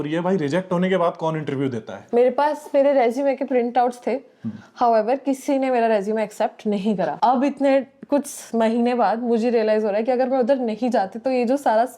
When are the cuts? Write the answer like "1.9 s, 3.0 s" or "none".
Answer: 2.0 s, 7.1 s